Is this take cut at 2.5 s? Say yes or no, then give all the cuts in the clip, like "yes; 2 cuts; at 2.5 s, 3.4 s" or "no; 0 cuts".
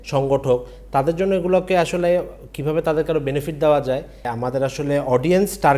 no; 1 cut; at 4.3 s